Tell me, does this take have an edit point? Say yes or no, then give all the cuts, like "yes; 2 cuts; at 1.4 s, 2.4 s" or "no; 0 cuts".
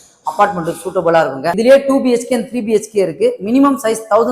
yes; 1 cut; at 1.5 s